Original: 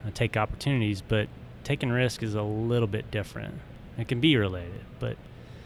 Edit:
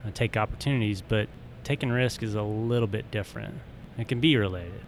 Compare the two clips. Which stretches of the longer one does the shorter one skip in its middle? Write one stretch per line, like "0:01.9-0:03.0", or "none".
none